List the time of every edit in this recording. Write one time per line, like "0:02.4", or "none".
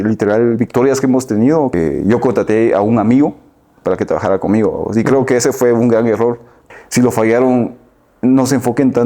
0:01.7
0:06.7